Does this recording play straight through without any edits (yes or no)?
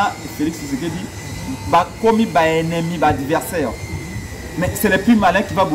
yes